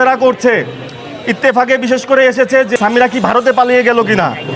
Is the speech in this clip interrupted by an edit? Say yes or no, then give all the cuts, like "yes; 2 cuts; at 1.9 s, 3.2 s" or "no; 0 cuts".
yes; 1 cut; at 2.7 s